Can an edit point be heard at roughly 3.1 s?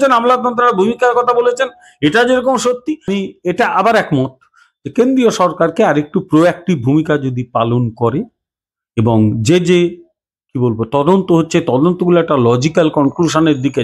yes; 1 cut; at 3.1 s

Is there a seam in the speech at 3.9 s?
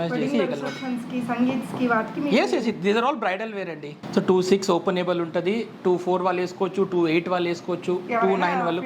yes; 1 cut; at 3.9 s

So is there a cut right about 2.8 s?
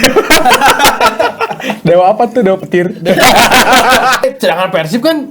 no; 1 cut; at 4.2 s

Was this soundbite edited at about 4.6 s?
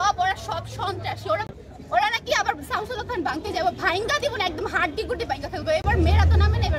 no; 1 cut; at 1.6 s

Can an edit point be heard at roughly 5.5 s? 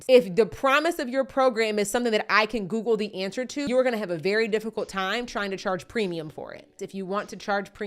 no; 2 cuts; at 3.7 s, 6.8 s

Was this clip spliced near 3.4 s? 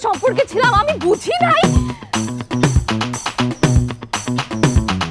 no; 1 cut; at 1.6 s

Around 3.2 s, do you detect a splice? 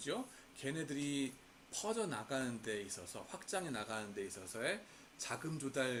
no; 0 cuts

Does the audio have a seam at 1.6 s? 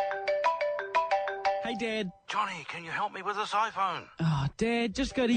yes; 1 cut; at 1.6 s

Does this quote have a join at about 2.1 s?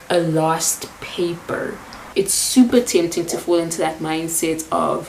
yes; 1 cut; at 2.1 s

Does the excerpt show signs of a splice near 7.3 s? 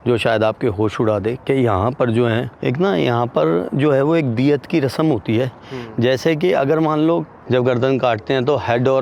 yes; 2 cuts; at 2.5 s, 7.3 s

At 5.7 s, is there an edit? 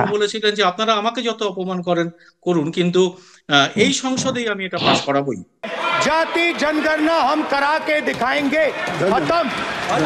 yes; 1 cut; at 5.7 s

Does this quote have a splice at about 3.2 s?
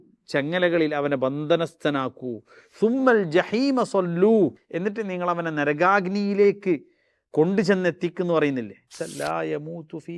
no; 2 cuts; at 4.7 s, 9.0 s

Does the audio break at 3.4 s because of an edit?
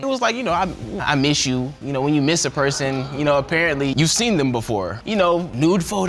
no; 0 cuts

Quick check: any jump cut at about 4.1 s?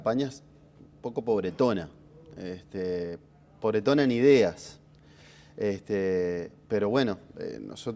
yes; 1 cut; at 4.1 s

